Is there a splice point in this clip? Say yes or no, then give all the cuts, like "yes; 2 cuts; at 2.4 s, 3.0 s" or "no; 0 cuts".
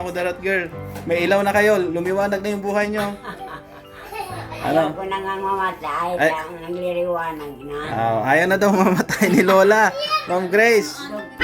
no; 0 cuts